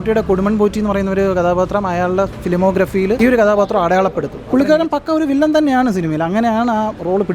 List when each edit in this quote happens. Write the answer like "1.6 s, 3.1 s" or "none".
3.2 s, 4.3 s